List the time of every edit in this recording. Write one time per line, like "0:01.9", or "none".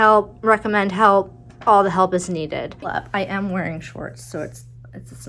0:02.9